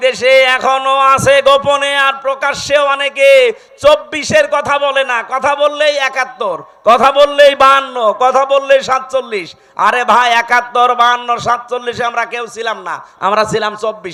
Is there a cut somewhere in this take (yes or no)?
no